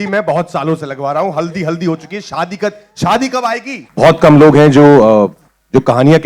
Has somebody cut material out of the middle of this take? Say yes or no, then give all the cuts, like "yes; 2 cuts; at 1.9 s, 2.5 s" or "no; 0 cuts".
yes; 1 cut; at 3.8 s